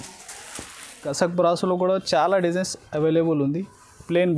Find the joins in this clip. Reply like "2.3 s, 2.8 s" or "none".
1.0 s